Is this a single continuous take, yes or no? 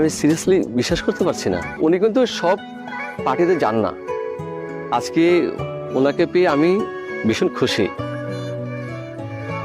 no